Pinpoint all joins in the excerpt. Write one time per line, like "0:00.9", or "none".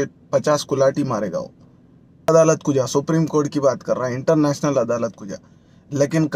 0:02.3